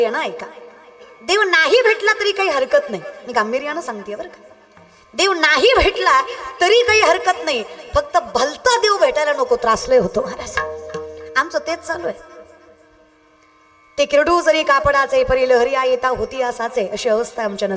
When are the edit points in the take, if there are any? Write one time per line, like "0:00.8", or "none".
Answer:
none